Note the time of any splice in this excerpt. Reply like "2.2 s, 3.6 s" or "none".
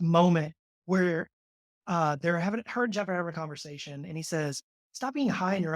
none